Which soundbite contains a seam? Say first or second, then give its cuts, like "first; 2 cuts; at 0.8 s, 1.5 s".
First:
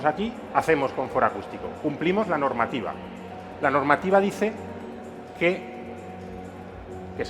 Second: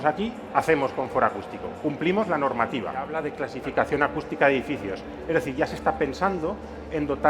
second; 1 cut; at 3.2 s